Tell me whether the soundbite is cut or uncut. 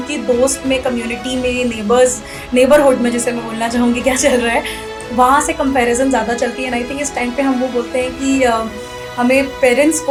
uncut